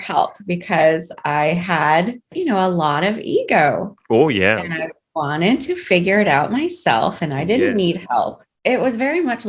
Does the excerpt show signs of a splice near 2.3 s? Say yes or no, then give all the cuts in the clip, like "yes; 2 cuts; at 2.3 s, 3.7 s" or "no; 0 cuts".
yes; 2 cuts; at 2.3 s, 8.4 s